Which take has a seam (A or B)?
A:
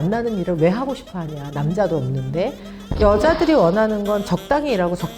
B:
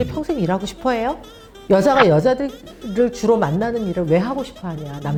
A